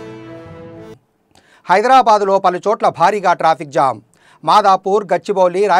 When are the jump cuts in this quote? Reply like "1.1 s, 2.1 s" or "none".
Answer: 1.0 s